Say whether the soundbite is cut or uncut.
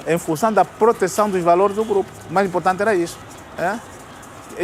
uncut